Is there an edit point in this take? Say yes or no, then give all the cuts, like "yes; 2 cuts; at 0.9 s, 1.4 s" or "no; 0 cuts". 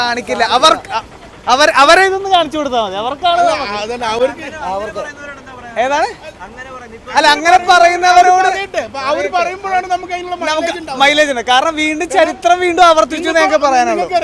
no; 0 cuts